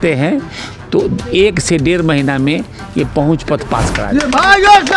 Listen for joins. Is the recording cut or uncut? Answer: uncut